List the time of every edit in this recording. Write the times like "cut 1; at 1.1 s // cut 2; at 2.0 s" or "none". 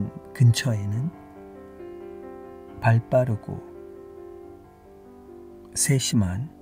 cut 1; at 1.1 s // cut 2; at 2.7 s // cut 3; at 3.6 s // cut 4; at 5.8 s